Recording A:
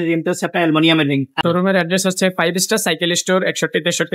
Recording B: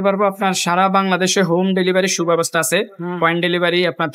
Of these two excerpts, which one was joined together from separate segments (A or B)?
A